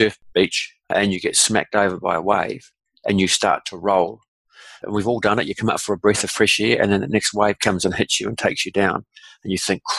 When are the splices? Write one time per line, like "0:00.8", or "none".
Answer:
0:04.8